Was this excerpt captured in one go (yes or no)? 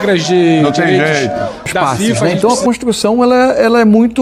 no